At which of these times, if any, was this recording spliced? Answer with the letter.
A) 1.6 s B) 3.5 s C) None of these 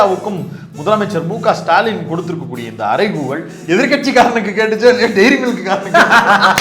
B